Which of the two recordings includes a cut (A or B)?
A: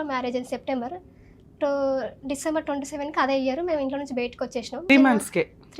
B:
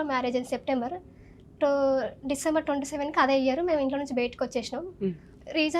A